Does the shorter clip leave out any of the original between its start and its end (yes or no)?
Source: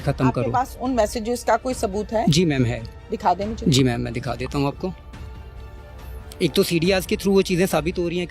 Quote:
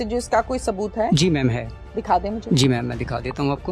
no